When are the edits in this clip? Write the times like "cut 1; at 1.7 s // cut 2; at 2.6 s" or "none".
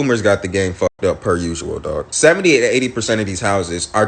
cut 1; at 1.8 s